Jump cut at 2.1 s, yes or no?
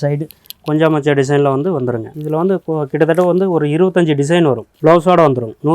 yes